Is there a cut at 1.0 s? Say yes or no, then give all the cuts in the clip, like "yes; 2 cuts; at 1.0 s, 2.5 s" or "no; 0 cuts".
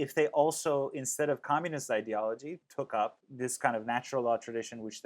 no; 2 cuts; at 2.6 s, 3.2 s